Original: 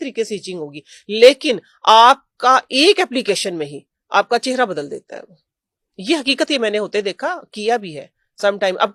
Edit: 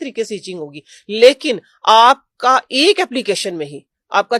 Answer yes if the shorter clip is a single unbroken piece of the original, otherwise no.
yes